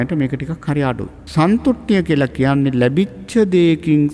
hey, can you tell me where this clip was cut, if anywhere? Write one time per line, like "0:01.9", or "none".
0:01.1